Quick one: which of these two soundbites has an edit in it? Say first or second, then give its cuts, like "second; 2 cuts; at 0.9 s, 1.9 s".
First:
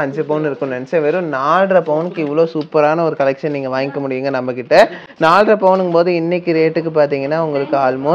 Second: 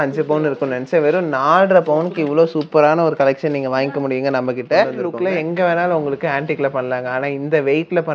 second; 1 cut; at 4.9 s